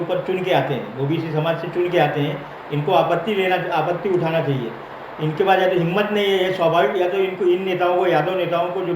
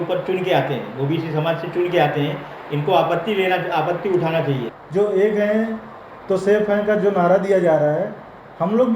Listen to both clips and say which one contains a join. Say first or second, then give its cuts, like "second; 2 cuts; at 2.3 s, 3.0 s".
second; 1 cut; at 4.7 s